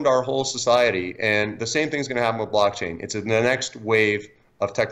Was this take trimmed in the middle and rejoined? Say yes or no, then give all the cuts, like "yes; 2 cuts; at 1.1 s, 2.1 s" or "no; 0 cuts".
no; 0 cuts